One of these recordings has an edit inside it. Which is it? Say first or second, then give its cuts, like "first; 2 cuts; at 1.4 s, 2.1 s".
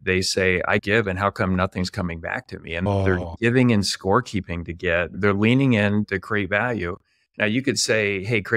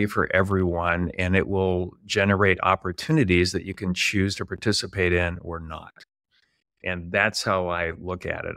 first; 3 cuts; at 2.9 s, 5.2 s, 6.1 s